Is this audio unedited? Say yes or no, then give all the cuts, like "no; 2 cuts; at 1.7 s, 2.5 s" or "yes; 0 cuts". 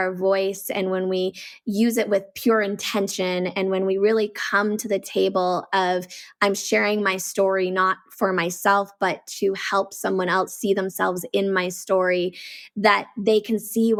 yes; 0 cuts